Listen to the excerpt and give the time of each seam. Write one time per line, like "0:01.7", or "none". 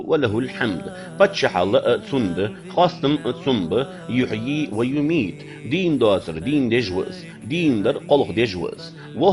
none